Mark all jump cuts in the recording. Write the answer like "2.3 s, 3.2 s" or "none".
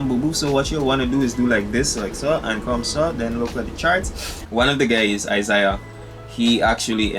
4.4 s